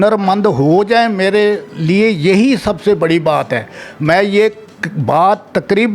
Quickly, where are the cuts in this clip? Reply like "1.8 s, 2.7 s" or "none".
none

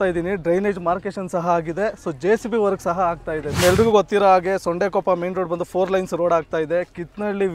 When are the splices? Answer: 3.6 s

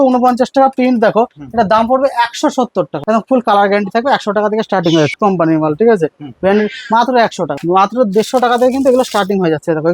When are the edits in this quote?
2.9 s, 5.1 s, 7.6 s

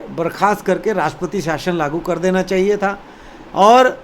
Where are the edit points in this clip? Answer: none

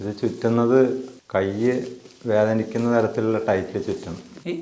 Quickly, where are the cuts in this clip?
1.2 s

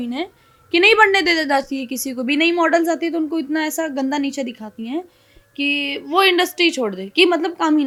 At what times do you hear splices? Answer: none

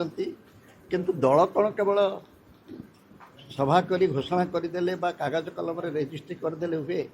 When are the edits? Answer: none

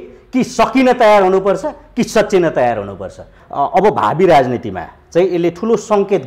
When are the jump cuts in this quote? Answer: 3.3 s

